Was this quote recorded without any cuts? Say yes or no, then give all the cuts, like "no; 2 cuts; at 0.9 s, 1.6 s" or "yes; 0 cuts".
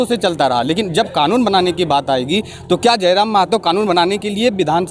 yes; 0 cuts